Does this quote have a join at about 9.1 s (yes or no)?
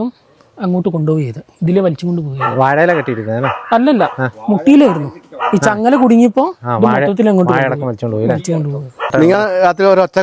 yes